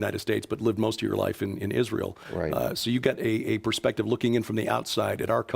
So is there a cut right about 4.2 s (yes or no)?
no